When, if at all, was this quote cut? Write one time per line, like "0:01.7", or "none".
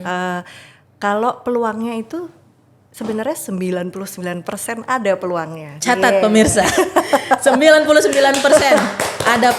none